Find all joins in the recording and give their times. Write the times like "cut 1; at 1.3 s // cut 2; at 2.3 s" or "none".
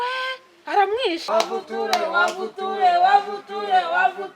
cut 1; at 1.2 s